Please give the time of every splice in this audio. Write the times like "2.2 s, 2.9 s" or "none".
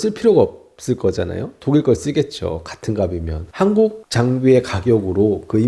3.5 s